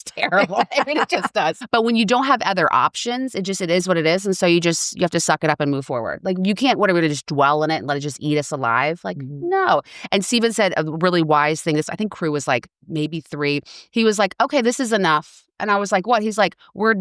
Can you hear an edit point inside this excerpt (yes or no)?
yes